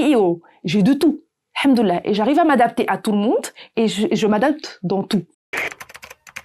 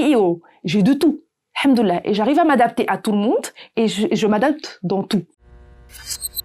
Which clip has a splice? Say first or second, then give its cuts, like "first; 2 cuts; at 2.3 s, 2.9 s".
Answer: second; 1 cut; at 5.5 s